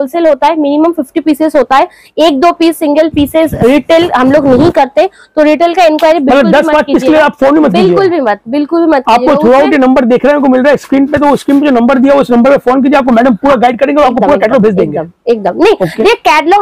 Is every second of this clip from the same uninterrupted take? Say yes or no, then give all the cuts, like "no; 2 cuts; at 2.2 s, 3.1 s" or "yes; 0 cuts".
yes; 0 cuts